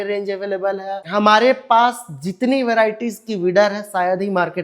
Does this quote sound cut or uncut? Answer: cut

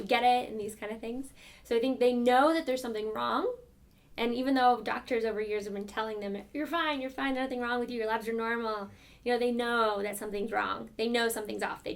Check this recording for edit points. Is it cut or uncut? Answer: uncut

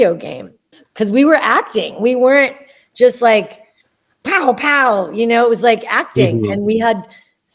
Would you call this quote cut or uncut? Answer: cut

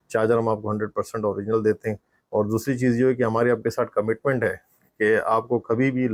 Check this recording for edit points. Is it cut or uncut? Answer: uncut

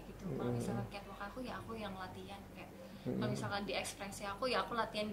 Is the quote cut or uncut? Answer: uncut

